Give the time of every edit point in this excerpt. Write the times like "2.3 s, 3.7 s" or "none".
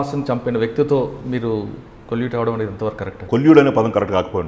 3.2 s